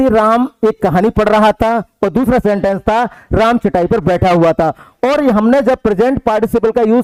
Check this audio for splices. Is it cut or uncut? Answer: uncut